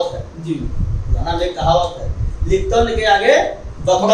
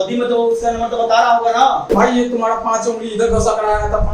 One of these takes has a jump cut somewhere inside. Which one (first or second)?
second